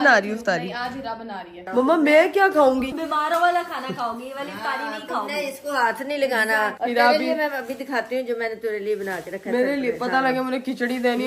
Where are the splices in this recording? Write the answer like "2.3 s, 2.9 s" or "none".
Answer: 1.6 s, 6.7 s